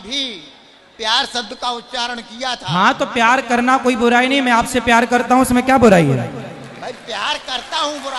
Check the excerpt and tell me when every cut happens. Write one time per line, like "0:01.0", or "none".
none